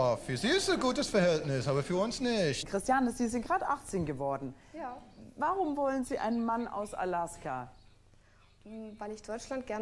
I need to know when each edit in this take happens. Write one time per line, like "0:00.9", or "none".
0:02.6